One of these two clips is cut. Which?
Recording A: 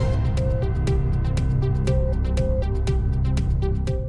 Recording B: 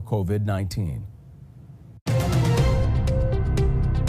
B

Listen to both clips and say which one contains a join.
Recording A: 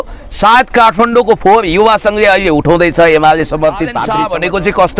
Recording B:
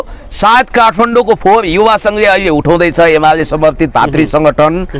A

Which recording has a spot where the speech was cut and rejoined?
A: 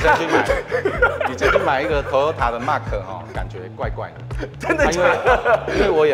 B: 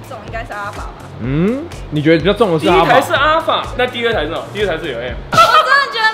B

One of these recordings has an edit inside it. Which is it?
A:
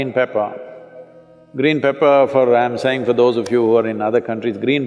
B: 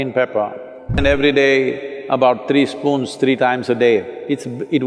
B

